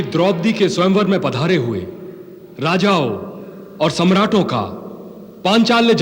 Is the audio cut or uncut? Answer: uncut